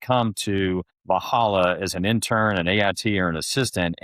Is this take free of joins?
no; 1 cut; at 0.9 s

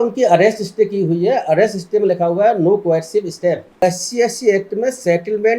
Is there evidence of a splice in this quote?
yes; 1 cut; at 3.8 s

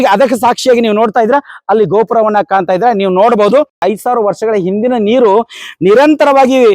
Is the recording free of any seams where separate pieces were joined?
no; 1 cut; at 3.8 s

